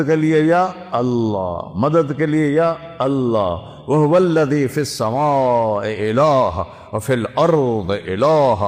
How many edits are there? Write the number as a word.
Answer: zero